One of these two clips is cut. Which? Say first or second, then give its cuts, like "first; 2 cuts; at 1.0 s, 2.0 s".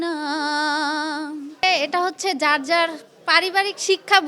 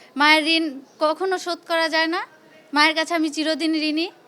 first; 1 cut; at 1.6 s